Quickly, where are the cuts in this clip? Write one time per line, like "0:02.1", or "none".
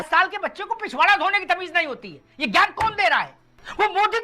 none

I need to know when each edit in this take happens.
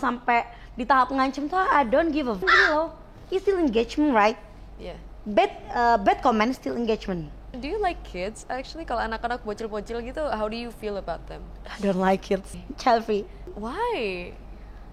0:02.5
0:07.5
0:12.7
0:13.5

